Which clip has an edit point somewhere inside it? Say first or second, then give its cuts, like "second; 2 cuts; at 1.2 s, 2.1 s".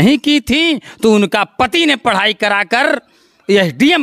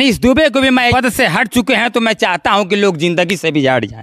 second; 1 cut; at 0.9 s